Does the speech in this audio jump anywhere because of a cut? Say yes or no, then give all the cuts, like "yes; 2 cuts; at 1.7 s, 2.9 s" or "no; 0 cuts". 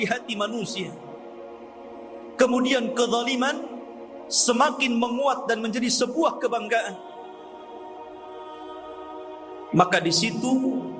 no; 0 cuts